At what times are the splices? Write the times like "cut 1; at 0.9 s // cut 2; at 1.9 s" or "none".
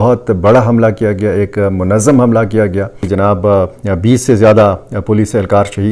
cut 1; at 2.9 s